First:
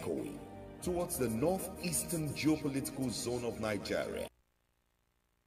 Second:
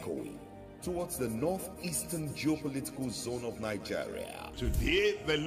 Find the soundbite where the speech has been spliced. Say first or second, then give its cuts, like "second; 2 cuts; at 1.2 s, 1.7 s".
first; 1 cut; at 4.2 s